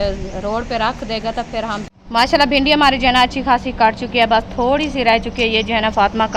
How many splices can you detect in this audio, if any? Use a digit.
1